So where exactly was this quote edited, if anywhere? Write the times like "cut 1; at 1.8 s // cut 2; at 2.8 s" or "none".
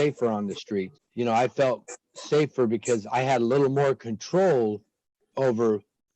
cut 1; at 1.0 s